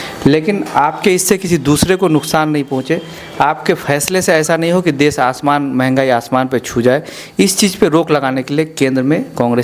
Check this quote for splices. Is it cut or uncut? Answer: uncut